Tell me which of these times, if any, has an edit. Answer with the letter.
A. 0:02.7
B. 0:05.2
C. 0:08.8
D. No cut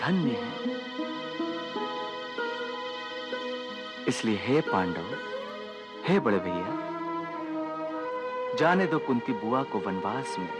D